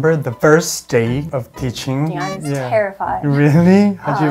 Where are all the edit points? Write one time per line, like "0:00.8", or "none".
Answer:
0:02.1

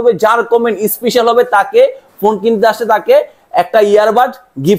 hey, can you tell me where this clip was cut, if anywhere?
none

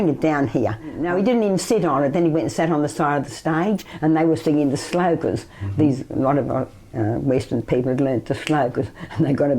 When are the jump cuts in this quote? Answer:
0:01.0

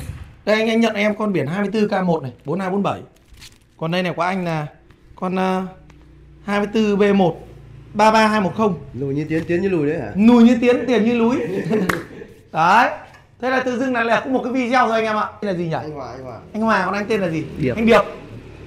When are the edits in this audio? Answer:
0:15.5

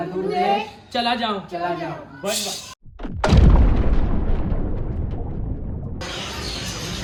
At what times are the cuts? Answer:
none

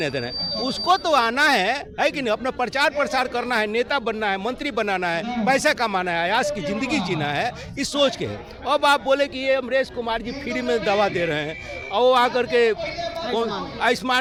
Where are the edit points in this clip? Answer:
none

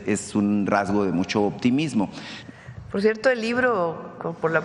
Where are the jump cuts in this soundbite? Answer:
0:02.3

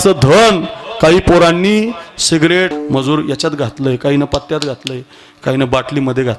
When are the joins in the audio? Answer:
0:02.7

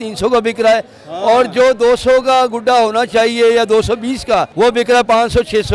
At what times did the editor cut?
0:04.5

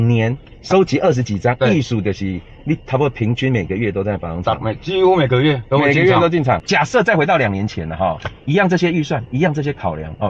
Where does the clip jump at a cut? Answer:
0:06.6

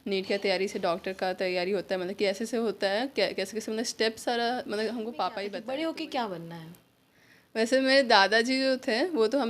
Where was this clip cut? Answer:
0:05.5

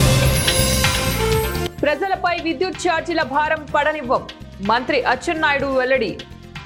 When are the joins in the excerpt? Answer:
none

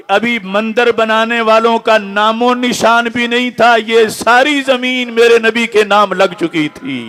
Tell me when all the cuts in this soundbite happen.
none

